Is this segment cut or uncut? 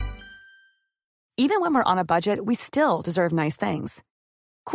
uncut